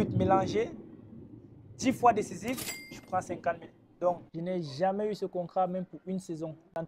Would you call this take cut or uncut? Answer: cut